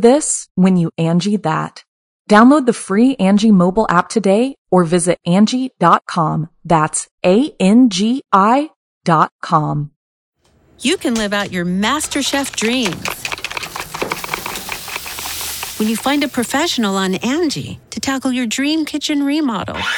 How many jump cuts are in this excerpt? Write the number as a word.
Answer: one